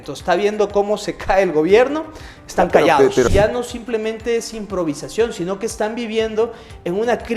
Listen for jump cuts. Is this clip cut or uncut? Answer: cut